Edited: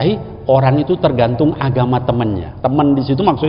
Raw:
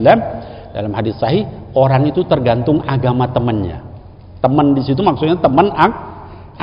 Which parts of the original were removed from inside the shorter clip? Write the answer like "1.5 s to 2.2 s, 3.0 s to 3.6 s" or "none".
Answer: 3.7 s to 4.3 s